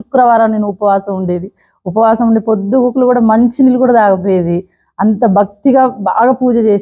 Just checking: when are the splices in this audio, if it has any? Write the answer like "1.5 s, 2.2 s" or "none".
none